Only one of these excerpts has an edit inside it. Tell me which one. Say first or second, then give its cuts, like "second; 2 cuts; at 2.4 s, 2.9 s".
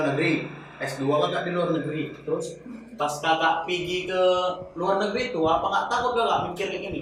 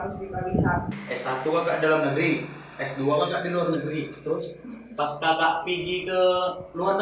second; 1 cut; at 0.9 s